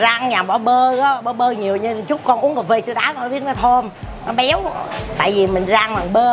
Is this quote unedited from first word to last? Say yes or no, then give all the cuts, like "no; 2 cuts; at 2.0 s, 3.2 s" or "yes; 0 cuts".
yes; 0 cuts